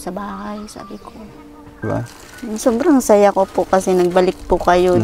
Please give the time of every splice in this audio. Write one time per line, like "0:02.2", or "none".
0:01.8